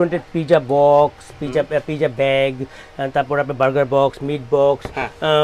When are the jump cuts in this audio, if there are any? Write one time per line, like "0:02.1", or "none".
none